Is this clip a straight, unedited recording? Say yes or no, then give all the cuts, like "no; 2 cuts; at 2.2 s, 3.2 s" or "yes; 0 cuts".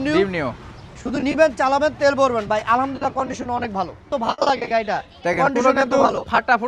no; 1 cut; at 4.1 s